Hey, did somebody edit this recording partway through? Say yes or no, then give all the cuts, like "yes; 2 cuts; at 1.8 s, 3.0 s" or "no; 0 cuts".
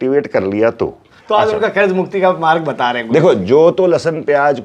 yes; 1 cut; at 1.1 s